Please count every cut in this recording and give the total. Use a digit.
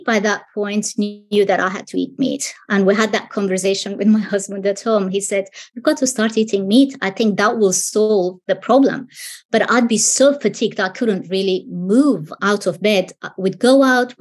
0